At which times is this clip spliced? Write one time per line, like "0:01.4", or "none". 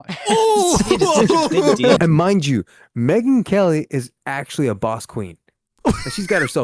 0:02.0